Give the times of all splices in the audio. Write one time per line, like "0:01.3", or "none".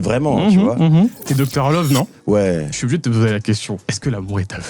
0:01.2
0:03.8